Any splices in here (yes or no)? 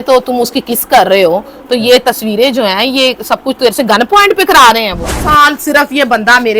yes